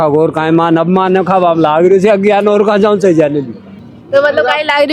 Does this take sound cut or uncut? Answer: uncut